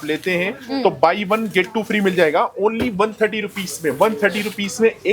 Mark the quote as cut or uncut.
uncut